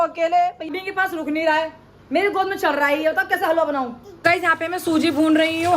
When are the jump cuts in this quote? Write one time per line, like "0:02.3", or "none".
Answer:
0:00.7
0:04.1